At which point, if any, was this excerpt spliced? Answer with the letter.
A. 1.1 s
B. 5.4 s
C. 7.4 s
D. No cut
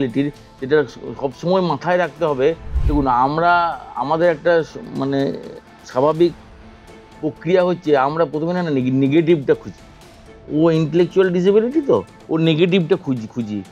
D